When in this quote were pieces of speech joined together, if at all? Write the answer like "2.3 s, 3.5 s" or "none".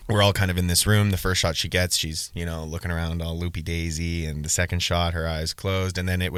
none